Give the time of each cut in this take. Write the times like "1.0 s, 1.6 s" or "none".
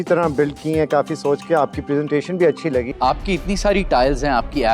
2.9 s